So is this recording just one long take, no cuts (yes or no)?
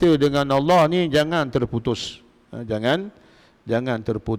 yes